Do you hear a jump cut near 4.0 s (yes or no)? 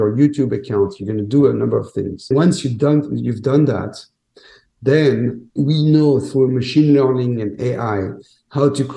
no